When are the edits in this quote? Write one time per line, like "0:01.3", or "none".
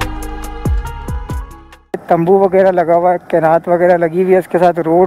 0:01.9